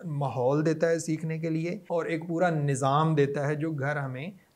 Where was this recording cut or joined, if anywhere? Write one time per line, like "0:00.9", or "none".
0:01.8